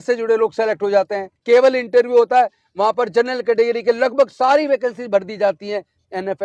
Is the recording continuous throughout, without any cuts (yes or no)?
no